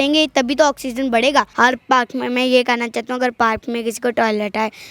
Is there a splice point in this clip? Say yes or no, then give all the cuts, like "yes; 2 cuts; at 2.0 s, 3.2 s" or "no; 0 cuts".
yes; 1 cut; at 1.5 s